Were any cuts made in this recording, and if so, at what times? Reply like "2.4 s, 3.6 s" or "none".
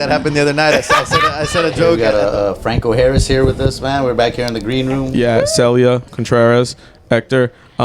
2.0 s, 5.1 s

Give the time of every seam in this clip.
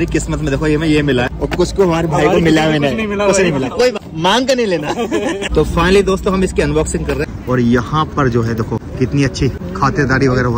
1.3 s, 4.0 s, 5.4 s, 7.2 s, 8.9 s, 9.6 s

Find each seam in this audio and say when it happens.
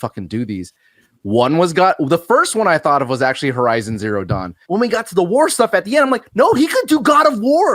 4.6 s

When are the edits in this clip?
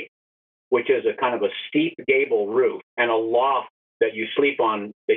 2.9 s, 3.8 s

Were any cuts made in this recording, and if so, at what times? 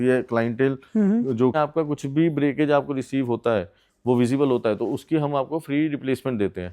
1.5 s

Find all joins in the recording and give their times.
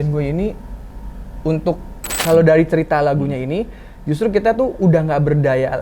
2.1 s

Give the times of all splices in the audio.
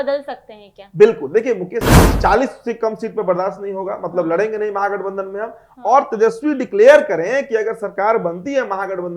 2.1 s

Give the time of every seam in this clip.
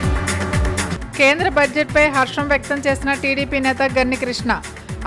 0.9 s

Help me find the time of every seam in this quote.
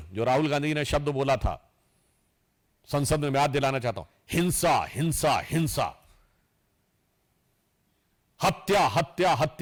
none

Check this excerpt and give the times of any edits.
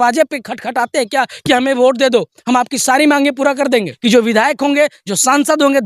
3.9 s

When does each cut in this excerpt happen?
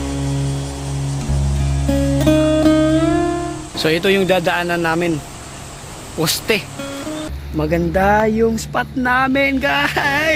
7.3 s

